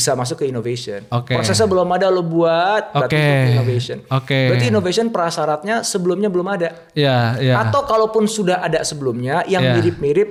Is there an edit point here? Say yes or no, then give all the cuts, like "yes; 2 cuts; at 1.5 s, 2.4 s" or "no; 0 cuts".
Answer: no; 0 cuts